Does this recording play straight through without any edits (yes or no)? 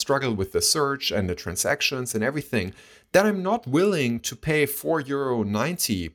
yes